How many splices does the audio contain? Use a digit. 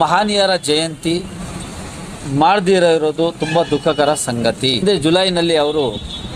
1